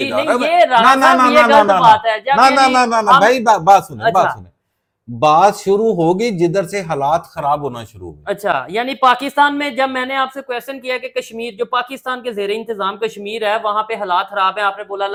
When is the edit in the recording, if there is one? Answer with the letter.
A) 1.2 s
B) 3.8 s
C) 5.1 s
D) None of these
D